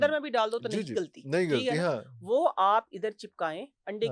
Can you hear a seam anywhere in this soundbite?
no; 0 cuts

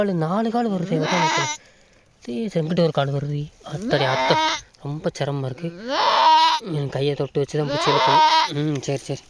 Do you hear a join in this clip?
no; 0 cuts

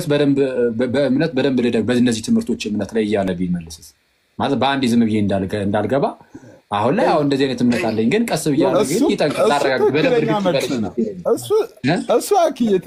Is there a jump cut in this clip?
no; 0 cuts

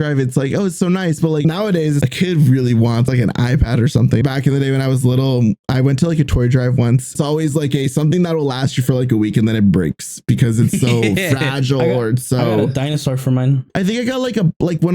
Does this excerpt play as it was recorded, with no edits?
no; 5 cuts; at 1.5 s, 3.1 s, 4.2 s, 7.1 s, 13.6 s

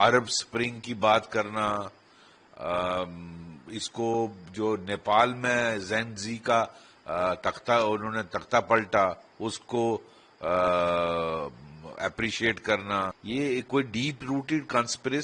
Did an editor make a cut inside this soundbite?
yes; 1 cut; at 13.2 s

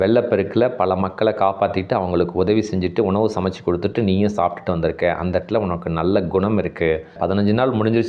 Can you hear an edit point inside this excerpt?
yes; 1 cut; at 7.1 s

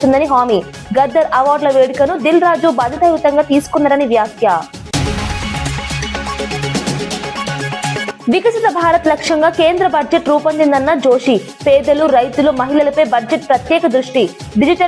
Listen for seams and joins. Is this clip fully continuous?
yes; 0 cuts

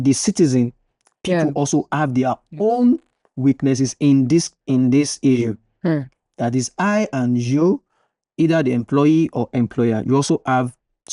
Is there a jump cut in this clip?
no; 0 cuts

